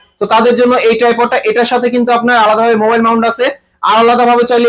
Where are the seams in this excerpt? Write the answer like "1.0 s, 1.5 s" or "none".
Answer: none